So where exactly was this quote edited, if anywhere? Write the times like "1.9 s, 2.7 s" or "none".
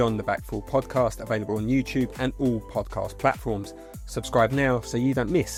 none